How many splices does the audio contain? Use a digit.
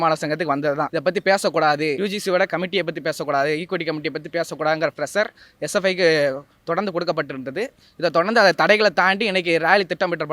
2